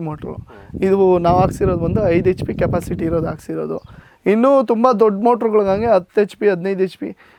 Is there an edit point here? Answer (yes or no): no